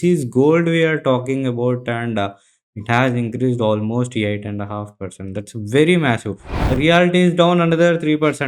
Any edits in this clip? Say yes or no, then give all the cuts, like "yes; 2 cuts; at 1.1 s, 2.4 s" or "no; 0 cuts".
yes; 1 cut; at 6.8 s